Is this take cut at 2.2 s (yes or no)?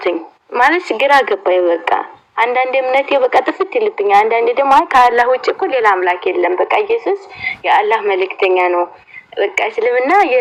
no